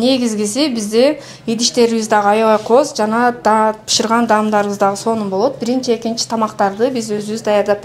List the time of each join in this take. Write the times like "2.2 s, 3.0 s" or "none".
none